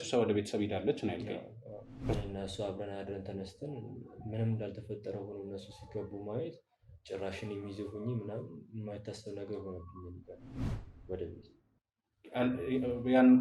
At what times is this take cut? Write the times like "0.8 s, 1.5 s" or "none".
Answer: 2.2 s, 10.5 s